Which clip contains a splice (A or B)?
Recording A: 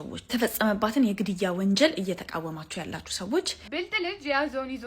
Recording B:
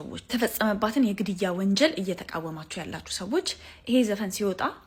A